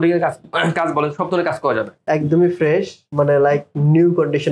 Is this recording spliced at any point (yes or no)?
yes